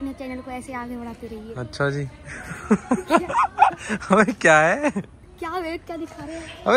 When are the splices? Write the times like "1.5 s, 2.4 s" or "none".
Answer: none